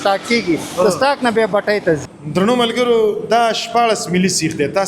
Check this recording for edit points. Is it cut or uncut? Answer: cut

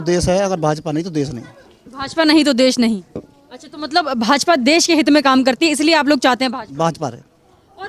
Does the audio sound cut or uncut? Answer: uncut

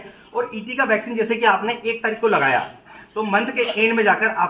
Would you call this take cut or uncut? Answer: cut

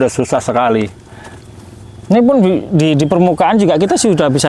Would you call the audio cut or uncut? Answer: uncut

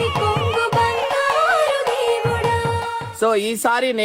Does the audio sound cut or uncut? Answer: uncut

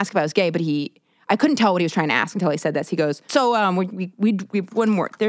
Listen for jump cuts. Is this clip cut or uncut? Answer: cut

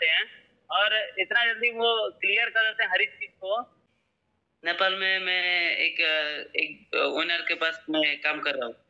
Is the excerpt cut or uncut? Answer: cut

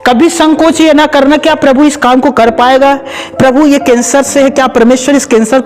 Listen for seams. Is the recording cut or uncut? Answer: uncut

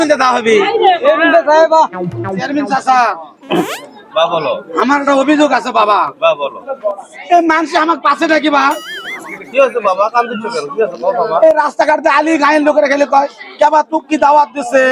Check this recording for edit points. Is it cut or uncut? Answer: cut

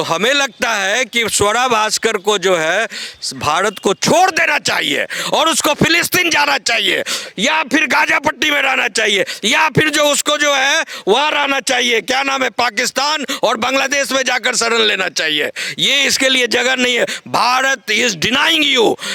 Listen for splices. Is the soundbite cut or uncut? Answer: uncut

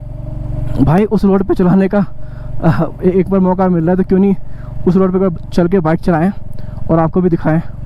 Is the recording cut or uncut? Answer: uncut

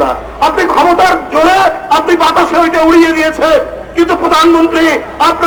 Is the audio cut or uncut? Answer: uncut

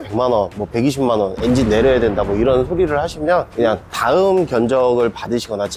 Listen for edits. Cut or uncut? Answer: uncut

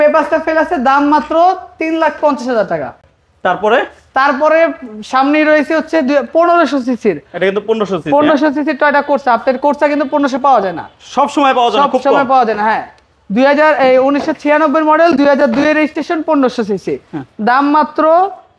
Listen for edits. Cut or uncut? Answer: uncut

